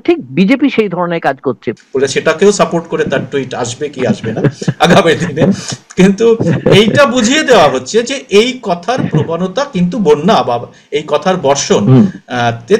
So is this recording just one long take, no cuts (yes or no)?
no